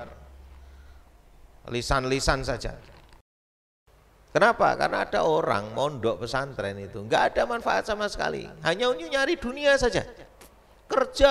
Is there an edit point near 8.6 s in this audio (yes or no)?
no